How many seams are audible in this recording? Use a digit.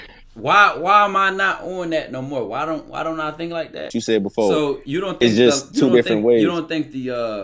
1